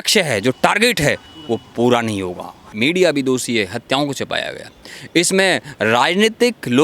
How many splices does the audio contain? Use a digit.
1